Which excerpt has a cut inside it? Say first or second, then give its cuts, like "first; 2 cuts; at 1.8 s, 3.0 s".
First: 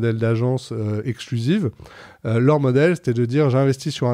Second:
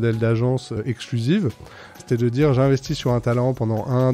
second; 2 cuts; at 0.8 s, 2.0 s